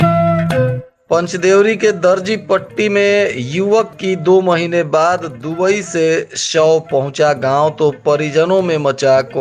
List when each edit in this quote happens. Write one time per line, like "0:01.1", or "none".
0:00.9